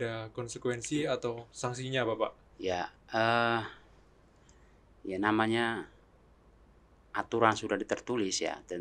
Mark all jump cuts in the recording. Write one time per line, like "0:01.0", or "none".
none